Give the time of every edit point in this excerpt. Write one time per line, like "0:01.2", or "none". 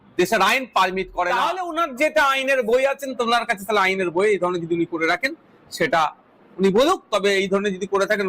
0:01.6